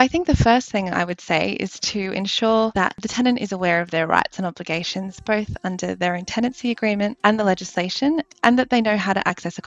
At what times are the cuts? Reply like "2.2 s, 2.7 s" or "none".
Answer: 3.0 s, 7.2 s

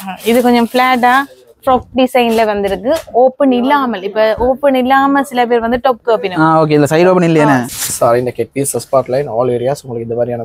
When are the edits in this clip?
7.7 s

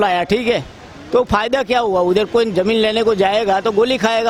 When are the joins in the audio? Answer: none

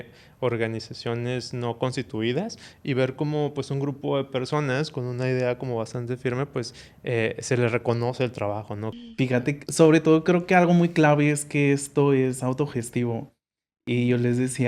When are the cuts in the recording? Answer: 8.9 s

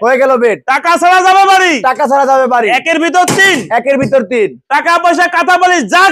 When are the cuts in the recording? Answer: none

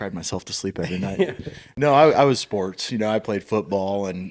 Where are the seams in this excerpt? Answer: none

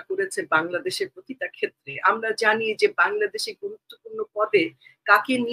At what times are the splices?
none

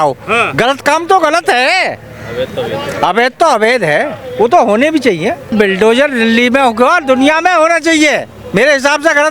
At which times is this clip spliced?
5.5 s

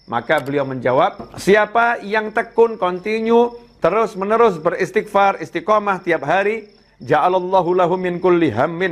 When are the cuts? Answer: 1.3 s

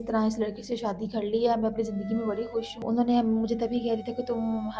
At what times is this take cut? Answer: 2.8 s

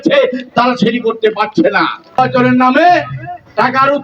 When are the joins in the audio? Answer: 2.2 s

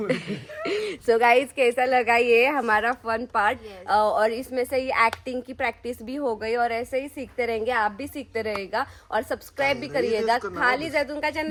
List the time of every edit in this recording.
none

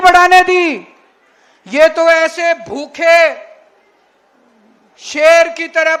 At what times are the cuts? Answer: none

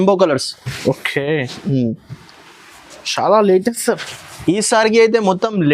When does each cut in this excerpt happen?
none

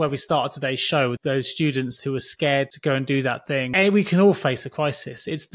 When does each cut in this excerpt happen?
1.2 s, 2.7 s, 3.7 s

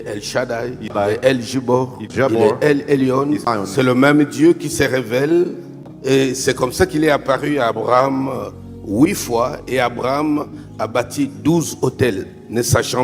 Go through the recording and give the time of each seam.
0.9 s, 2.1 s, 3.5 s, 5.9 s

